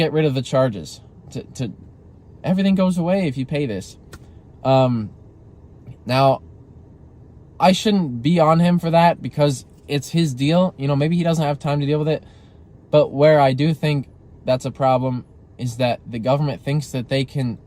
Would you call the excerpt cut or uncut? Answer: uncut